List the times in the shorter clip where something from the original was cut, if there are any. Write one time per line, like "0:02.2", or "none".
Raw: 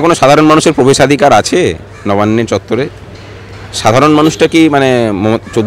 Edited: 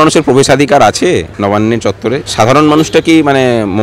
0:01.3
0:02.3